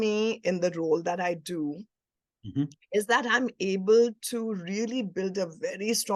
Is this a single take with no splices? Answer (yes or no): yes